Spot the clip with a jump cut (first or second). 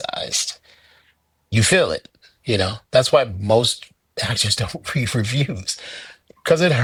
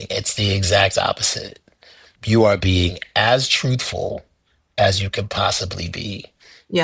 second